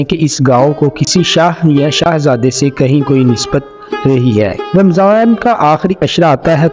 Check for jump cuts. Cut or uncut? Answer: cut